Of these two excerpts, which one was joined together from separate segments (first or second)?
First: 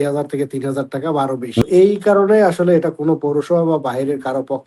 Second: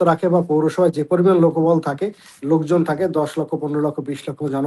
first